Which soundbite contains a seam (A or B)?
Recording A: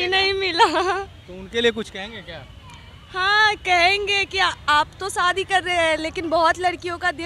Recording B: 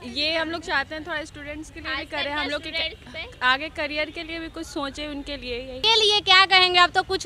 B